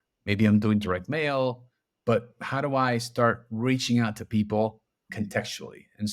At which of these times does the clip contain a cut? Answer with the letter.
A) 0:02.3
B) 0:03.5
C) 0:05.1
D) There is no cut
C